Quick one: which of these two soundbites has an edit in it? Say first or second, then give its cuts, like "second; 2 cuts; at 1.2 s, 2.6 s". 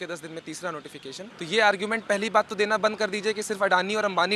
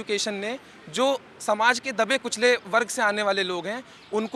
first; 1 cut; at 1.3 s